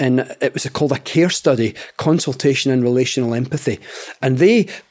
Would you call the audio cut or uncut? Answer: uncut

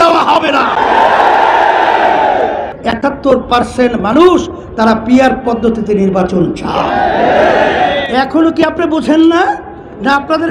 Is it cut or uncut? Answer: cut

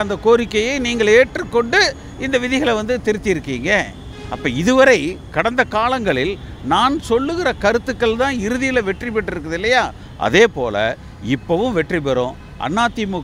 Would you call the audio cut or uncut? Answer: uncut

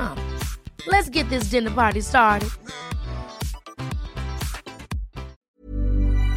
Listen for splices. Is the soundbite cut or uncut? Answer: cut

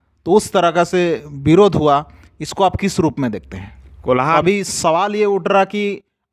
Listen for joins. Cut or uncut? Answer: cut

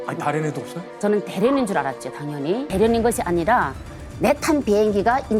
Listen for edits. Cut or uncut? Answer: cut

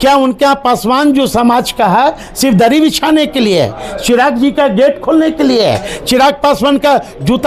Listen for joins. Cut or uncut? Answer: uncut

